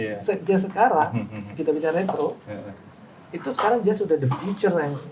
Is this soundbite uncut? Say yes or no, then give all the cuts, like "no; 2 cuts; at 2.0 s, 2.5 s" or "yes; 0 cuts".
yes; 0 cuts